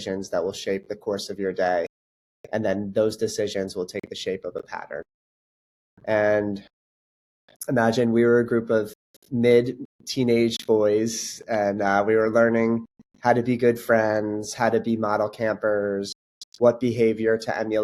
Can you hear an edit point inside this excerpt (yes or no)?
no